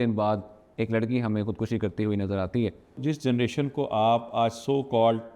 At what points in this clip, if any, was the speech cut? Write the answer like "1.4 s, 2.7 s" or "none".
3.0 s